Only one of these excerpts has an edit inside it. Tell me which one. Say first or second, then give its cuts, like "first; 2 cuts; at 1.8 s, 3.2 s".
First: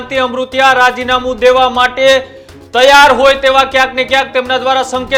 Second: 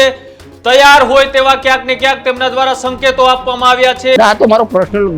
second; 1 cut; at 4.2 s